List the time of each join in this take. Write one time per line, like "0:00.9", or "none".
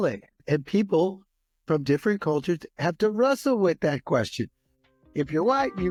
none